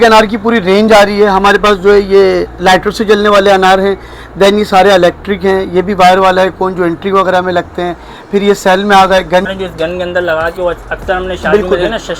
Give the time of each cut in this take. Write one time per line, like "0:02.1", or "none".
0:09.5